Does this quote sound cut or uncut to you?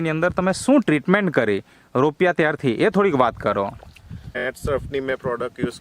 cut